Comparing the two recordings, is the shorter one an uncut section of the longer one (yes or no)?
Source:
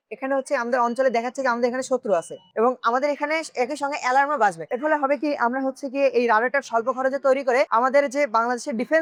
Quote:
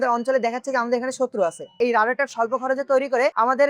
no